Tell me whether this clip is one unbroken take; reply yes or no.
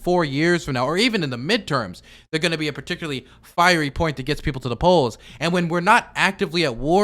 yes